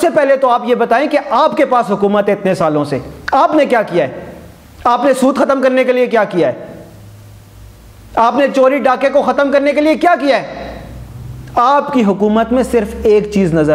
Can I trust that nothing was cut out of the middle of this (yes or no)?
yes